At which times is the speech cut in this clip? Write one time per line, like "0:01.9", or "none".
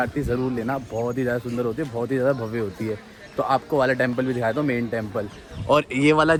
none